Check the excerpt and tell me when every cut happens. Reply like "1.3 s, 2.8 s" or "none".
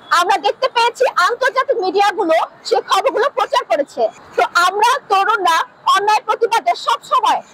4.2 s